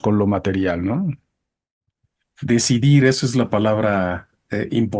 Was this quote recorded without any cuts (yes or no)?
no